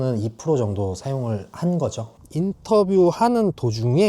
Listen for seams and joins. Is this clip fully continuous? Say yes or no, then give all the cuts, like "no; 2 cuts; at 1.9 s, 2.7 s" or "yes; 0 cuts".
no; 1 cut; at 2.1 s